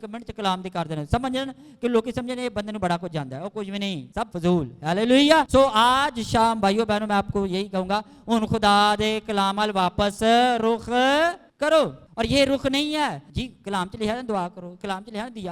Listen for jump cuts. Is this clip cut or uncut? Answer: cut